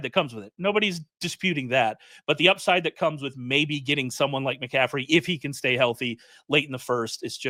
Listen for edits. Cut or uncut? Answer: uncut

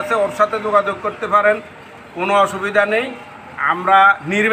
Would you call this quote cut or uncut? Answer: uncut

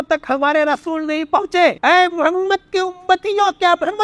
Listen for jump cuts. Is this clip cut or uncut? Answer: cut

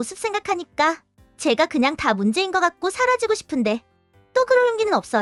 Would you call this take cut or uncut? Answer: uncut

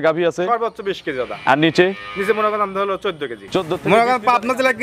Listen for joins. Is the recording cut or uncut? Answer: cut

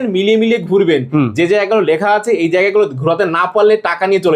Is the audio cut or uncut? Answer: uncut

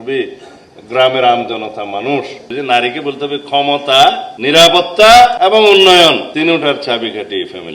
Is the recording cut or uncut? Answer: cut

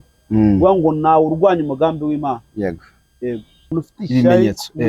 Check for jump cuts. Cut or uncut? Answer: cut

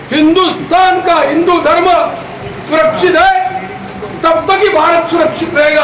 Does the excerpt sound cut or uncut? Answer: uncut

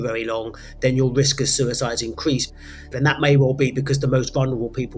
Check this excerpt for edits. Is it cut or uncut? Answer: cut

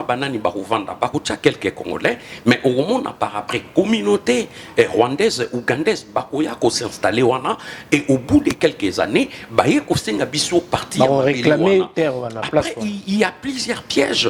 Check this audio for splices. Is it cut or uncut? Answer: uncut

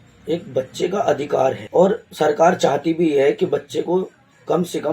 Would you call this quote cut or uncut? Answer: cut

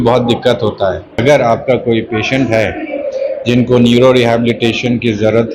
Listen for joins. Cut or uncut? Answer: cut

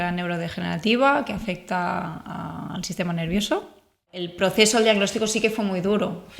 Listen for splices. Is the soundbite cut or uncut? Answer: cut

